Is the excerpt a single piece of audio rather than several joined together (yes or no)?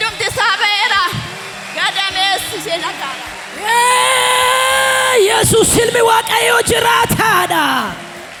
yes